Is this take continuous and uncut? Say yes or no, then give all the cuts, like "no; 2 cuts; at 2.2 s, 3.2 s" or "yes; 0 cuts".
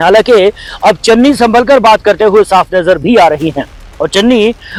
yes; 0 cuts